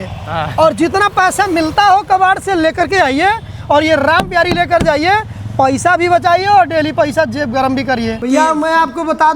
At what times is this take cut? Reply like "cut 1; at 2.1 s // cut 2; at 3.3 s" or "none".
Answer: cut 1; at 8.2 s